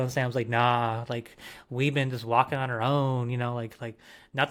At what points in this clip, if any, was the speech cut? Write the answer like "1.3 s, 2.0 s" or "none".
none